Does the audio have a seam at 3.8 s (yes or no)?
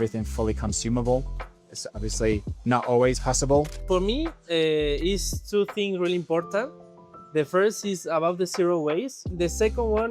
yes